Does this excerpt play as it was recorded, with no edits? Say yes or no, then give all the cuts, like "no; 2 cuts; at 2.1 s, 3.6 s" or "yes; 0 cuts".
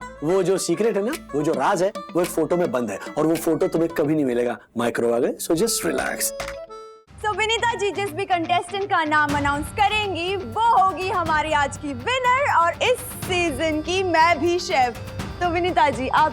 no; 1 cut; at 7.0 s